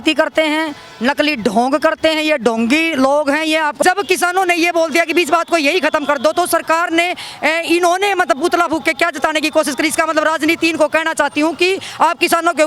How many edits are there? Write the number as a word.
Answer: one